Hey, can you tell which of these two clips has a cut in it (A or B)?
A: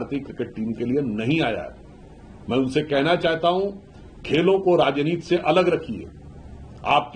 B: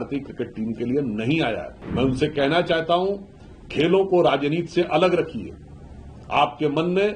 B